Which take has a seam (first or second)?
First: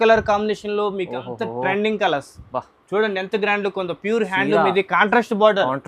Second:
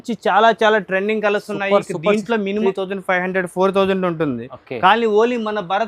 second